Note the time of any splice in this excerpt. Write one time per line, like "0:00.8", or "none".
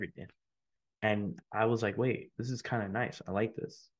0:01.4
0:02.3